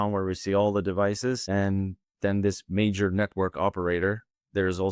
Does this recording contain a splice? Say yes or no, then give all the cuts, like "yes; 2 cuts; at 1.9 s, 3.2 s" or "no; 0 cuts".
yes; 1 cut; at 1.4 s